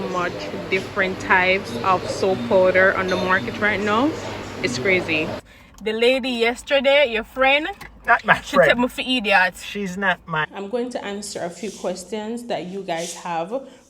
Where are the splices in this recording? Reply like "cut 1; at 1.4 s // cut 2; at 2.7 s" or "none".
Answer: cut 1; at 5.5 s // cut 2; at 10.5 s